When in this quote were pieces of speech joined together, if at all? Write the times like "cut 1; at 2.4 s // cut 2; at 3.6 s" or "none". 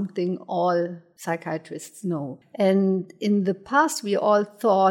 cut 1; at 1.1 s // cut 2; at 2.4 s